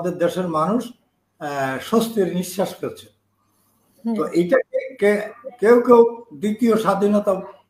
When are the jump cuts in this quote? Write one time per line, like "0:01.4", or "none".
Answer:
none